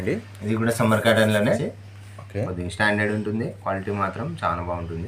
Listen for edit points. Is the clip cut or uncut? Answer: cut